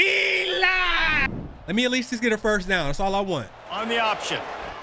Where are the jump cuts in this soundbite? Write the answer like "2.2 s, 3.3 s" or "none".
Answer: 1.3 s